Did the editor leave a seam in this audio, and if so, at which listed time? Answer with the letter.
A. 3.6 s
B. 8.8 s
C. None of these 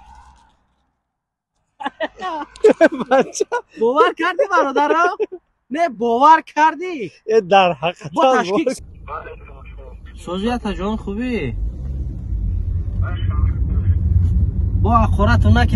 B